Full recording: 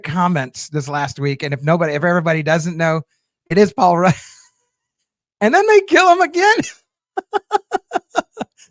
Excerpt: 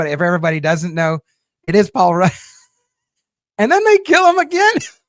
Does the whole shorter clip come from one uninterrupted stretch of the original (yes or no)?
yes